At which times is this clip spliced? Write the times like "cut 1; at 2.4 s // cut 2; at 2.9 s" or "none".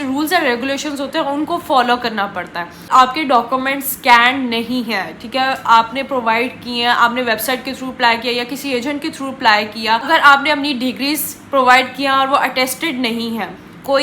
cut 1; at 2.8 s // cut 2; at 10.1 s